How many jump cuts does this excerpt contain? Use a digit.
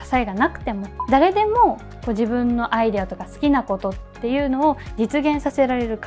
0